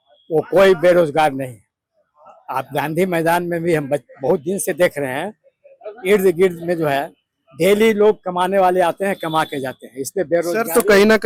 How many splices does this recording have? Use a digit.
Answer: 0